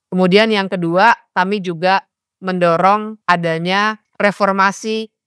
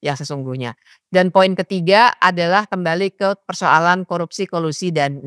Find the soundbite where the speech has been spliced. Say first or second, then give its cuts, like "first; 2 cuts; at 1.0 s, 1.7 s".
first; 2 cuts; at 3.1 s, 4.1 s